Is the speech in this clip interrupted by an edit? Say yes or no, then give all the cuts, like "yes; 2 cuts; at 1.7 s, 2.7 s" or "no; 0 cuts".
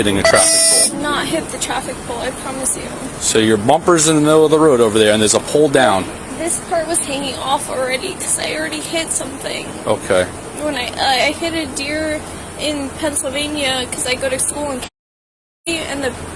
no; 0 cuts